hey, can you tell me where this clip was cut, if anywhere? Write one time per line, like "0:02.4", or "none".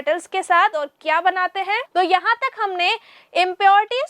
0:01.8